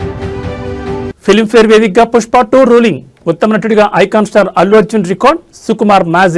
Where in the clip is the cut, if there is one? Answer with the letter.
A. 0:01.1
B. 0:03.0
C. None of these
A